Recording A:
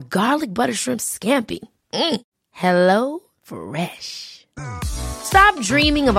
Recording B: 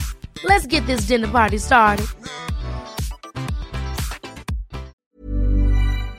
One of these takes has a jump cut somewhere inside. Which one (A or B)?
B